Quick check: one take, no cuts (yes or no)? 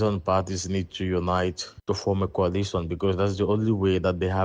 yes